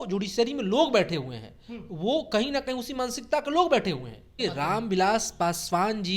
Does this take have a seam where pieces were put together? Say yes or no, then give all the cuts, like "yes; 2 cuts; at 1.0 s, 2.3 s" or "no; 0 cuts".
yes; 1 cut; at 4.3 s